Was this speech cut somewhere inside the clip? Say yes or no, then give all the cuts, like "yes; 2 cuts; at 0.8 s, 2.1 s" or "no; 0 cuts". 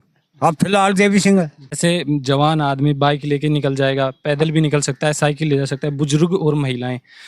yes; 1 cut; at 1.8 s